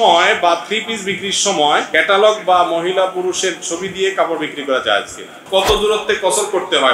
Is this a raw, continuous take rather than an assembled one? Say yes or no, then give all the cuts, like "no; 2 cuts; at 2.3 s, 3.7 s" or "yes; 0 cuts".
no; 2 cuts; at 1.9 s, 5.4 s